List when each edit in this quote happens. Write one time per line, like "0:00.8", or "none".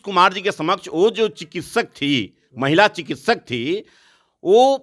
none